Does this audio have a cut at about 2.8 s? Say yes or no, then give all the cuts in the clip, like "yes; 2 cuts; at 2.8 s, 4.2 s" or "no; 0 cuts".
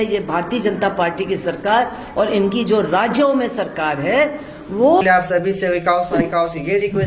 no; 1 cut; at 5.0 s